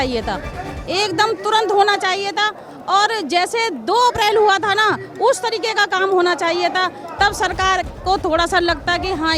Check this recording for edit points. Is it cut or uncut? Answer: uncut